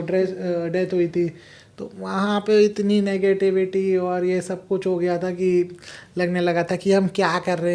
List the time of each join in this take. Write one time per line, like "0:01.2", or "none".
none